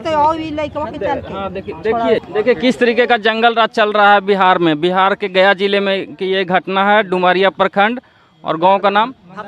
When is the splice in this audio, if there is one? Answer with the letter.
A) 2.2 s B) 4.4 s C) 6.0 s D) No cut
A